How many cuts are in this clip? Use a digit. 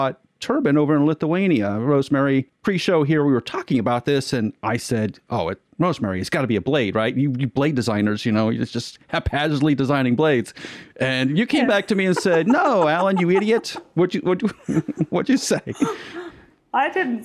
1